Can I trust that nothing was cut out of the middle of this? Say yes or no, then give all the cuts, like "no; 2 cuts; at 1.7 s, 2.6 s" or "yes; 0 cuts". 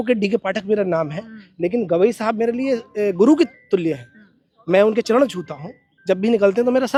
yes; 0 cuts